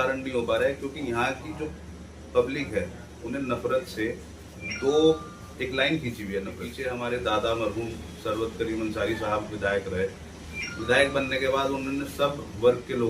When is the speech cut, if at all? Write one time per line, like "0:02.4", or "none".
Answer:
0:06.7